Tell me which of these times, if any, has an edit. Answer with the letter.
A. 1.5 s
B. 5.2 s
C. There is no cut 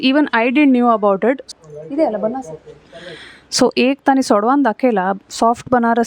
A